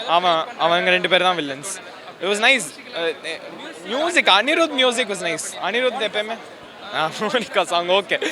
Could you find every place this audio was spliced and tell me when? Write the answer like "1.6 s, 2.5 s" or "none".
none